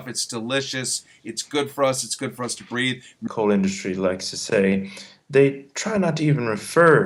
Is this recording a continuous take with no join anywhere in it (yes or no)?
yes